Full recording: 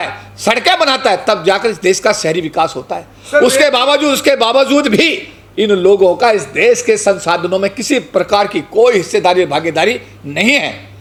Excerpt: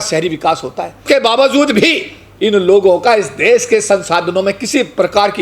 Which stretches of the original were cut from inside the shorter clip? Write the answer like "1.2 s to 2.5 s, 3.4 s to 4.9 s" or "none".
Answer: 3.1 s to 4.2 s